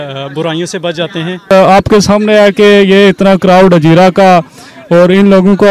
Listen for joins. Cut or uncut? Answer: cut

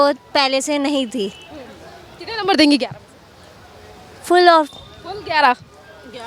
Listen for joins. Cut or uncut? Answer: uncut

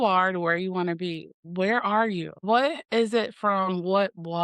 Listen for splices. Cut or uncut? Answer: cut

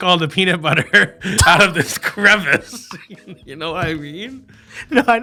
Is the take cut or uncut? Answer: uncut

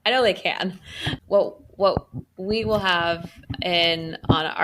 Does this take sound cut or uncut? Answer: uncut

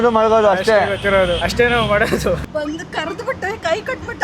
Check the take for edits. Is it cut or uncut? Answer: cut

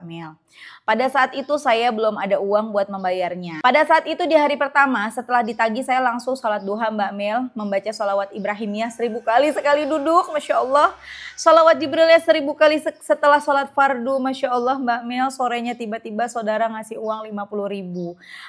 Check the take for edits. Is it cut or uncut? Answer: cut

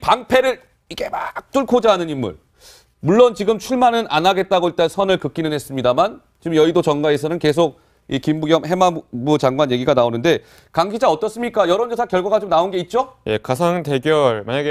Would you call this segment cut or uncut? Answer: uncut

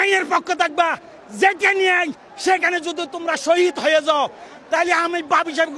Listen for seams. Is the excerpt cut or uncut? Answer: uncut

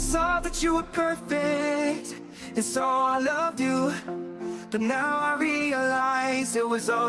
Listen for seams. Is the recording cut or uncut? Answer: uncut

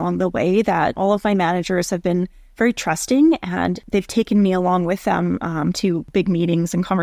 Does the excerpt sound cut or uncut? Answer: uncut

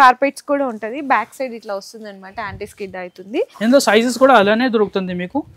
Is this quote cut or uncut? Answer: cut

